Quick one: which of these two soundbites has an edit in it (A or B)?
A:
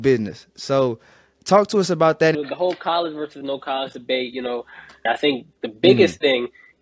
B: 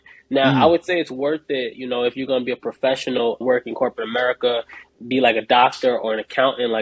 A